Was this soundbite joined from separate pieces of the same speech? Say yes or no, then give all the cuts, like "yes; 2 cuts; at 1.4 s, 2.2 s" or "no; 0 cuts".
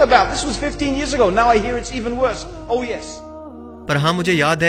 no; 0 cuts